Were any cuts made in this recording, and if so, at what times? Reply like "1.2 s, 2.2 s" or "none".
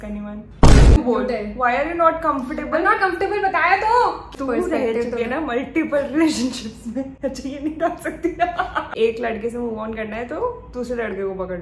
1.0 s, 4.3 s, 8.8 s